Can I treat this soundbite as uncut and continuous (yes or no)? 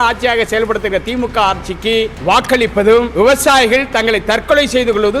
no